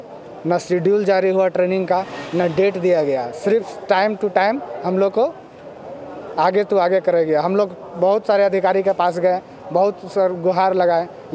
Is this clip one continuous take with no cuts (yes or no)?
yes